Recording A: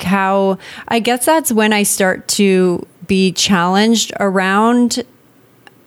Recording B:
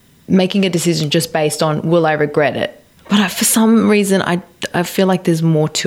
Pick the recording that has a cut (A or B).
B